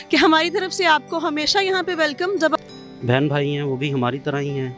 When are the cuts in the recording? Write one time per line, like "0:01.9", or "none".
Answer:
0:02.6